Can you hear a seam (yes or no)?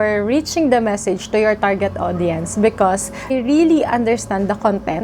yes